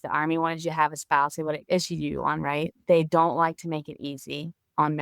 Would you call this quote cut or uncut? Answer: cut